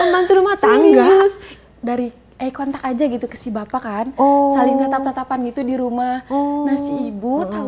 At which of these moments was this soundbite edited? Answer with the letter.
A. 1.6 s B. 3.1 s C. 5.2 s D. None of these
A